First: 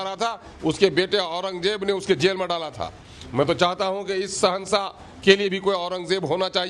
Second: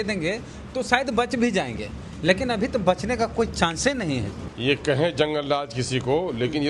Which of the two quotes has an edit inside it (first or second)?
second